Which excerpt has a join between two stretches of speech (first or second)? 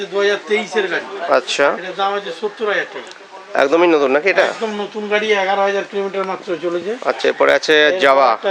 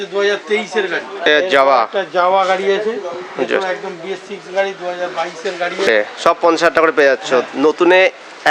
second